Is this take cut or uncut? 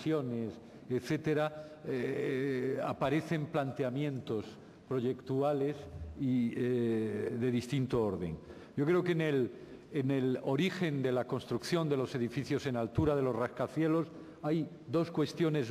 cut